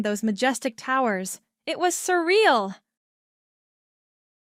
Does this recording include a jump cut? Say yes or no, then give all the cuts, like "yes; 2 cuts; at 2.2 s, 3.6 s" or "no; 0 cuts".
no; 0 cuts